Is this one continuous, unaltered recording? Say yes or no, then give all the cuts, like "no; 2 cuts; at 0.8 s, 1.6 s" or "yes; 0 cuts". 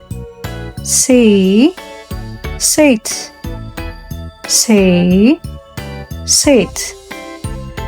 no; 2 cuts; at 3.0 s, 4.6 s